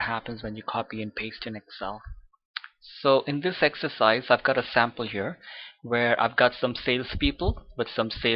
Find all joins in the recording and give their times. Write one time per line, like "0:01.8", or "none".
0:06.6